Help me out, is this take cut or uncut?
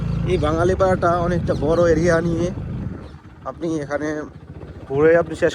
uncut